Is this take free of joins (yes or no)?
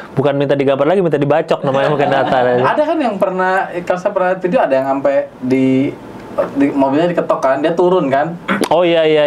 yes